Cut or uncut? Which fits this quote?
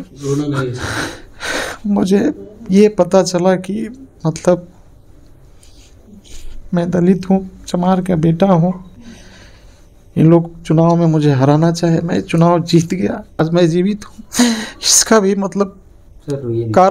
cut